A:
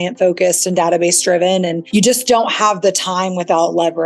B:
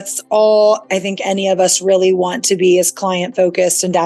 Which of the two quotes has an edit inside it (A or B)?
A